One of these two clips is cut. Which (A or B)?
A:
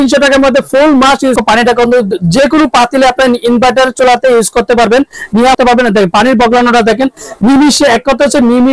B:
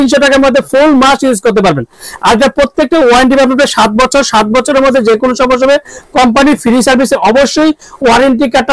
A